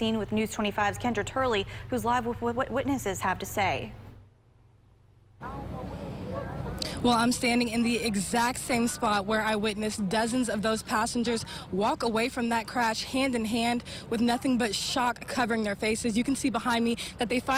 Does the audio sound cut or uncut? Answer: uncut